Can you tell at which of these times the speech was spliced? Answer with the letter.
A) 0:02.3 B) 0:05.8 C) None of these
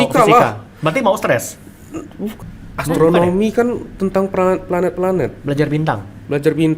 A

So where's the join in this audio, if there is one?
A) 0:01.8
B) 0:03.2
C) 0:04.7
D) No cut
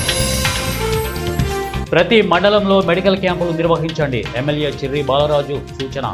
A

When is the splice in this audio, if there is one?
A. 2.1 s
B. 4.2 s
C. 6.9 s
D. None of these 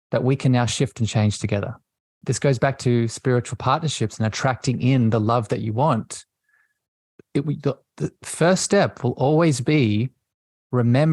A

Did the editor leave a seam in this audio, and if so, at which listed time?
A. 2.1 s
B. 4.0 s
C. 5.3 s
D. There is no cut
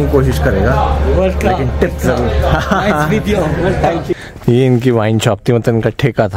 B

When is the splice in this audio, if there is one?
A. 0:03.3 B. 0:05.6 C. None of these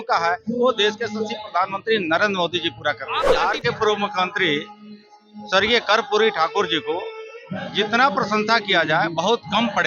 A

